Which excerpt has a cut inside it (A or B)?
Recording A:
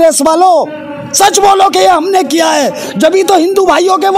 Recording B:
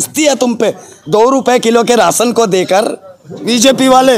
B